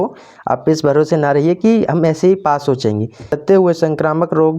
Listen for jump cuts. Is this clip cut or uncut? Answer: cut